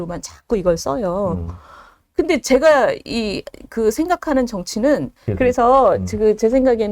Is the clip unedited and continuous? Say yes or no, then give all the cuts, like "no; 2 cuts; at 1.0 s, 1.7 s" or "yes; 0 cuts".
no; 1 cut; at 5.3 s